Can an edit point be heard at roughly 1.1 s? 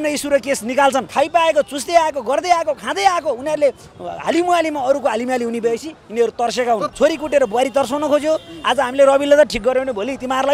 yes; 2 cuts; at 1.1 s, 6.9 s

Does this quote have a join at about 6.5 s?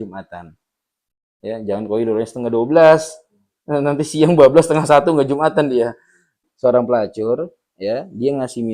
yes; 1 cut; at 6.5 s

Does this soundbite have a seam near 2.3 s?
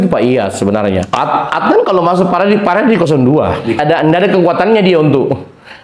no; 2 cuts; at 1.1 s, 3.8 s

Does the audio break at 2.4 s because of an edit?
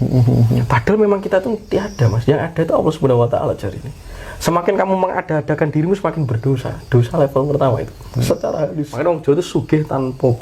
no; 1 cut; at 9.0 s

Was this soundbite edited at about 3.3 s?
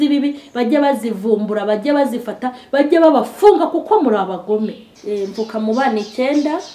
no; 1 cut; at 4.9 s

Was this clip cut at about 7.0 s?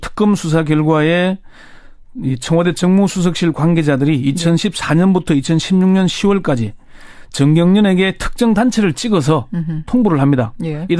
no; 1 cut; at 4.4 s

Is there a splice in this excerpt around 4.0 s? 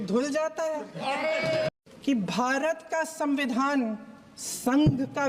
no; 1 cut; at 1.7 s

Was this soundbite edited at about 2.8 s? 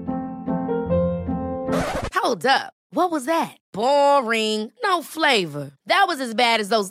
no; 0 cuts

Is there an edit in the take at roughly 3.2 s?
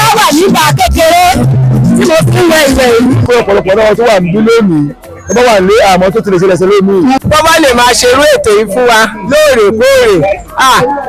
yes; 2 cuts; at 3.2 s, 7.2 s

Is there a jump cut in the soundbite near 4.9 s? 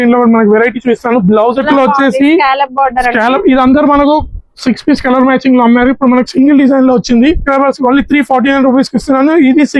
no; 2 cuts; at 1.7 s, 7.4 s

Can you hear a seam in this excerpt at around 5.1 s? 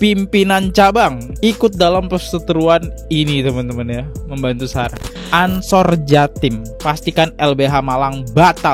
yes; 1 cut; at 5.1 s

